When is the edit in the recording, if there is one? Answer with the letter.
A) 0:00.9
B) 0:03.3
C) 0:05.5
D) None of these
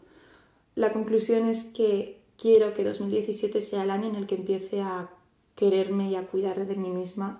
A